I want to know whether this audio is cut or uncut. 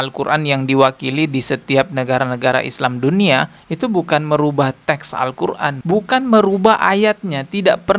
uncut